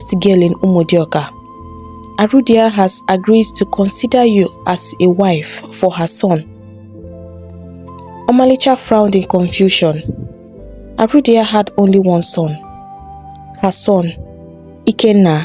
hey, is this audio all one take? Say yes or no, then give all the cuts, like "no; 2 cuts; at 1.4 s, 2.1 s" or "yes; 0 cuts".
yes; 0 cuts